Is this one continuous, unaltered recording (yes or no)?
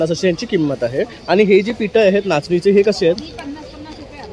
yes